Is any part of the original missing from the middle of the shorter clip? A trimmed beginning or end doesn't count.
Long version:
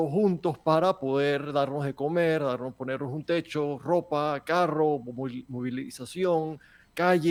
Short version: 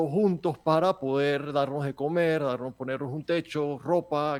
no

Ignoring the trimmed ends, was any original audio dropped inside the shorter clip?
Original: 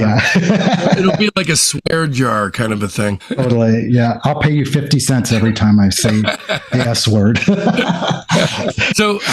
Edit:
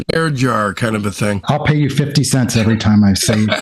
yes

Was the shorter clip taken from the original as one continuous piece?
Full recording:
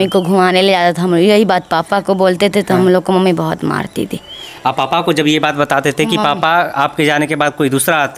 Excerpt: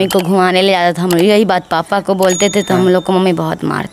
yes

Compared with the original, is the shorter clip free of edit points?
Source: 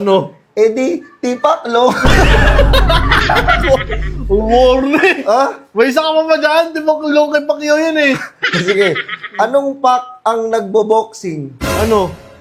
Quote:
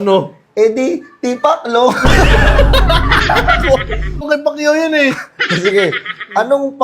no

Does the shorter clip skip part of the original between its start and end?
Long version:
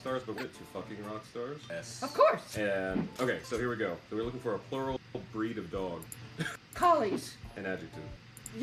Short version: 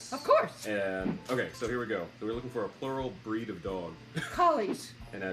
yes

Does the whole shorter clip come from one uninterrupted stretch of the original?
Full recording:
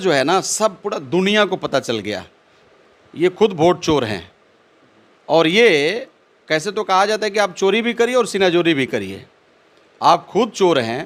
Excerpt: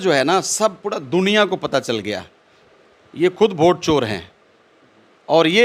yes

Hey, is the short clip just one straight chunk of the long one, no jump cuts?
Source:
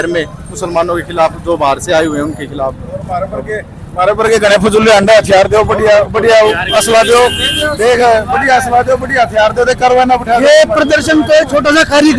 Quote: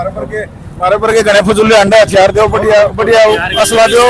yes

